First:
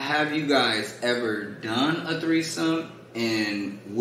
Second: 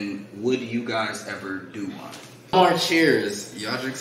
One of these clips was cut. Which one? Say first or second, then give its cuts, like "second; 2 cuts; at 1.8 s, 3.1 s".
second; 1 cut; at 2.5 s